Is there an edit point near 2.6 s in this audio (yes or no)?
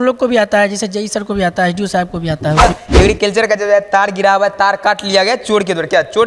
yes